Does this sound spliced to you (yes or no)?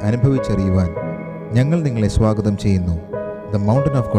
no